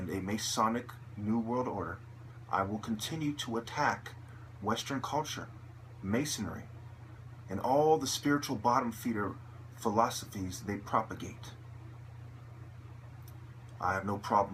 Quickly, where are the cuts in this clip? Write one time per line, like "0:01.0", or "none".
0:09.2